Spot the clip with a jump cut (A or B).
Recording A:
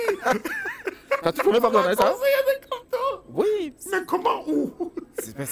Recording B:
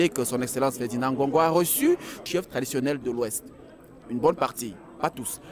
B